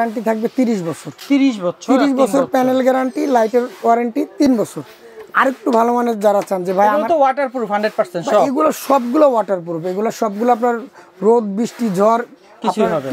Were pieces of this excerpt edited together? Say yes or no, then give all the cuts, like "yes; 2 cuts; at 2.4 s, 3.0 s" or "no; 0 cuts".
no; 0 cuts